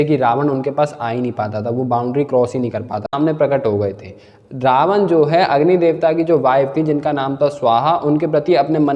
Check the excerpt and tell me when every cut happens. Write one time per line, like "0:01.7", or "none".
0:03.1